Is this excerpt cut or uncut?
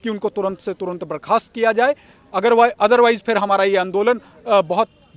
uncut